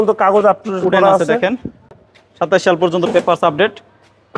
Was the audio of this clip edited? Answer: no; 0 cuts

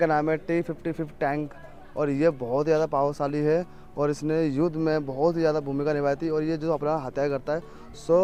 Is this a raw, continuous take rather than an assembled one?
yes; 0 cuts

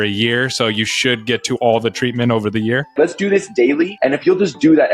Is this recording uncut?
no; 2 cuts; at 2.9 s, 3.9 s

